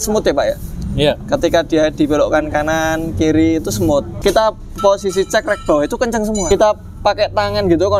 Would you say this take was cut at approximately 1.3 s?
no; 2 cuts; at 4.1 s, 6.4 s

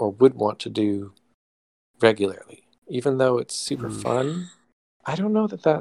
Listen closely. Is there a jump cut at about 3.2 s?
no; 0 cuts

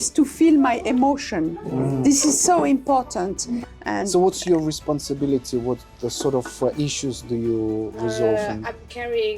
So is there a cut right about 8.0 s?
no; 1 cut; at 3.7 s

